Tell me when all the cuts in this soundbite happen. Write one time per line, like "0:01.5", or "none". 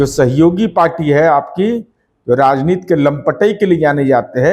none